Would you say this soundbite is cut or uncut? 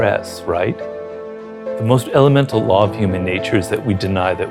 uncut